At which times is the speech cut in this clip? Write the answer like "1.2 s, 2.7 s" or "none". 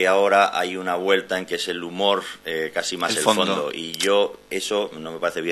none